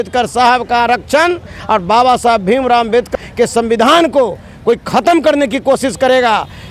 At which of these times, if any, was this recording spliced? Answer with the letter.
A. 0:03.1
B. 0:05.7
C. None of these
A